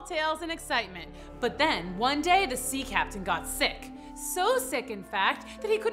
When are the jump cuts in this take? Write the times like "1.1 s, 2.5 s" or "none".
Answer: none